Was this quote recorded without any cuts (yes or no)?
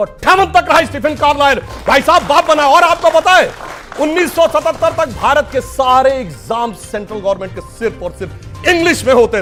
yes